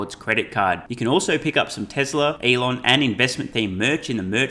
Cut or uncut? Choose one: cut